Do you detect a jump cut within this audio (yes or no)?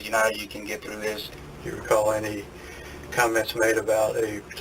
yes